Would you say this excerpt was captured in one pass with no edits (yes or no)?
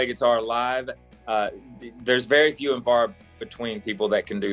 yes